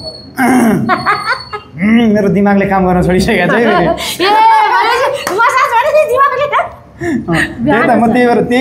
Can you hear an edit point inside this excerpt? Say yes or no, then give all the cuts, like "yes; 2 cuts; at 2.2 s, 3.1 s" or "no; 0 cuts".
no; 0 cuts